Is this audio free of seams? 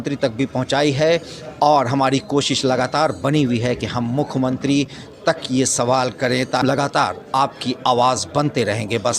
no; 1 cut; at 6.6 s

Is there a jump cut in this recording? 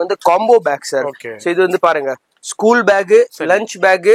no; 0 cuts

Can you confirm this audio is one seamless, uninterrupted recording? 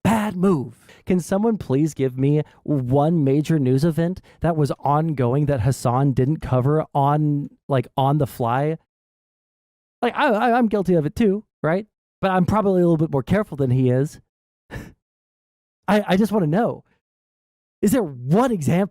no; 1 cut; at 0.9 s

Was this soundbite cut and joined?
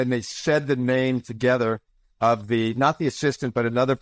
no; 0 cuts

